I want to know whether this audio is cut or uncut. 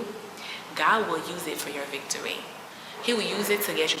cut